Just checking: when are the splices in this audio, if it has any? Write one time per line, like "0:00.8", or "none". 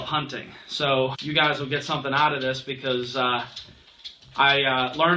none

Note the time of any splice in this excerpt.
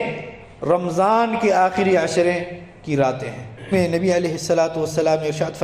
0:03.7

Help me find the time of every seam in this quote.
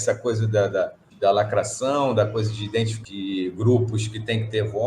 0:01.0
0:02.9

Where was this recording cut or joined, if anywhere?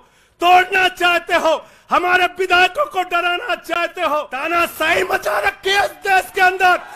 0:04.3

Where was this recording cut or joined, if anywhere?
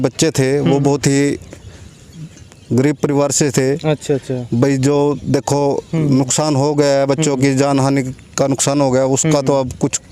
none

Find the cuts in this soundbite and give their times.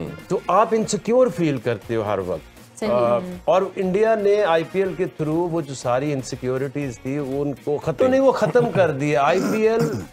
0:08.0

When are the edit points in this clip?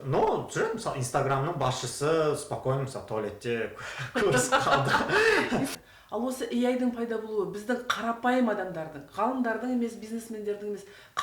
0:05.7

